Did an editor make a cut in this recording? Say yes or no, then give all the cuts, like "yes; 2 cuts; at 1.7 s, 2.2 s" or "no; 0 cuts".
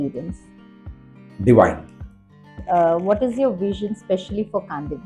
yes; 1 cut; at 2.5 s